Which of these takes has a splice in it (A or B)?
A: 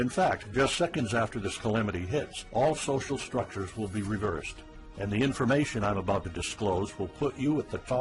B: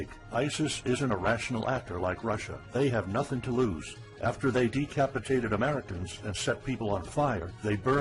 B